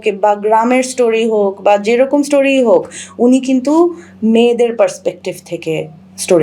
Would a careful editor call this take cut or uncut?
uncut